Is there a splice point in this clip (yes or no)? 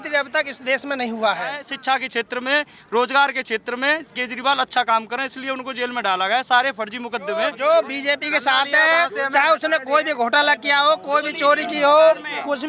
yes